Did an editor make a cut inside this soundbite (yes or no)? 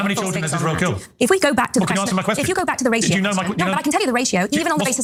no